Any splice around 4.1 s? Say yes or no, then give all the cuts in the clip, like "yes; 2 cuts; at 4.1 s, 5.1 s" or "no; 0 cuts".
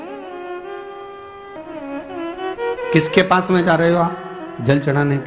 no; 1 cut; at 1.6 s